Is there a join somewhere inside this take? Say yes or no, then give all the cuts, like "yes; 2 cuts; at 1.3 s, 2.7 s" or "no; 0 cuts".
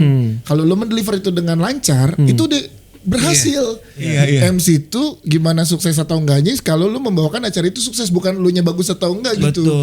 yes; 1 cut; at 4.1 s